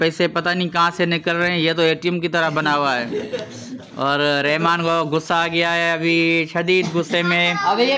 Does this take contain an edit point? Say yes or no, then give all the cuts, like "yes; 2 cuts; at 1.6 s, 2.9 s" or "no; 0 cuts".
no; 0 cuts